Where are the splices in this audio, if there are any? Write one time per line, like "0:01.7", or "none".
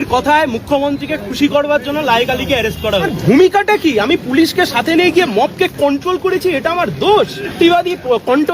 0:03.2
0:07.6